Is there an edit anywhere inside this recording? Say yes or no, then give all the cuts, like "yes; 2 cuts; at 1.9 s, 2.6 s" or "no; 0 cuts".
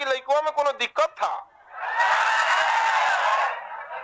no; 0 cuts